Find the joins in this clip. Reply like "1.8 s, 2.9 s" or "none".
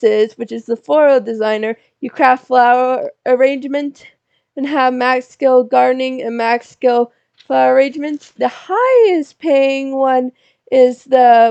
none